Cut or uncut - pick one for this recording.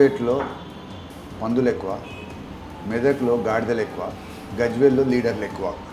uncut